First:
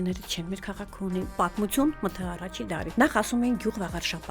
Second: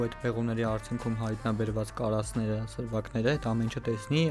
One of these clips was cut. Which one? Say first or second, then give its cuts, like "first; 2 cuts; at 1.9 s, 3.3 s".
first; 2 cuts; at 1.3 s, 2.9 s